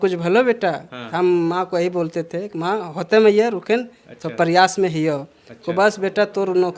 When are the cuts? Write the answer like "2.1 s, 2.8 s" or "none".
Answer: none